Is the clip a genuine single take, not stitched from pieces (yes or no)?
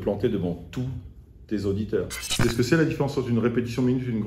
no